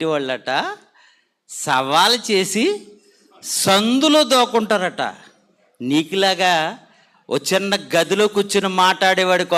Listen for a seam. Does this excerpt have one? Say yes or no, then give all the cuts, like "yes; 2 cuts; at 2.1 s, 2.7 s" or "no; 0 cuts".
no; 0 cuts